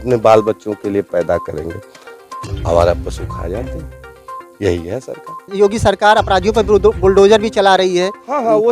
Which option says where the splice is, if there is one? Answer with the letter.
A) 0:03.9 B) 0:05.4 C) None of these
C